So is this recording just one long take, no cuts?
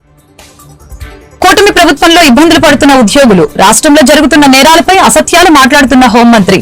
no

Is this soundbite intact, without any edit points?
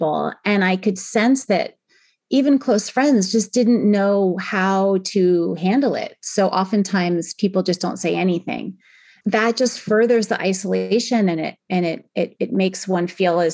yes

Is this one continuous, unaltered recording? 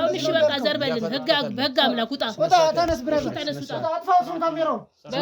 yes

